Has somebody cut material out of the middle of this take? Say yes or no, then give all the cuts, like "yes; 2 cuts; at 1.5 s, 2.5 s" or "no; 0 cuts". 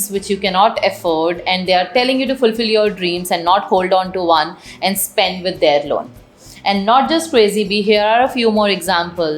no; 0 cuts